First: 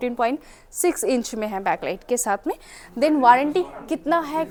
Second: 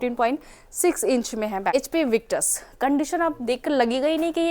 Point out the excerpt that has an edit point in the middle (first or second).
second